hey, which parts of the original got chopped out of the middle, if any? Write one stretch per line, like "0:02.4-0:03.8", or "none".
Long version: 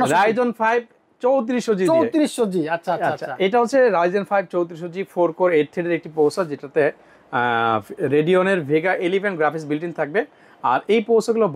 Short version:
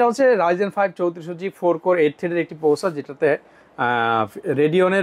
none